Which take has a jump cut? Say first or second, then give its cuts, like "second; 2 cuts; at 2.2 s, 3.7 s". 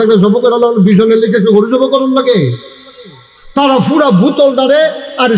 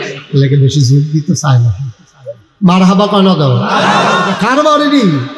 second; 1 cut; at 4.3 s